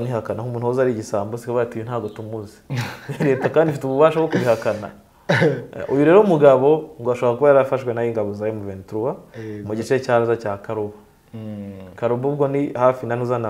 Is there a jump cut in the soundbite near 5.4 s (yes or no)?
no